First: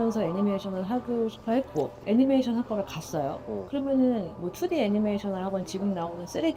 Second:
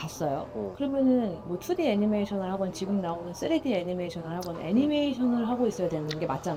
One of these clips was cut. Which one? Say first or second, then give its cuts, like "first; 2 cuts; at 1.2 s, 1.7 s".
first; 1 cut; at 2.0 s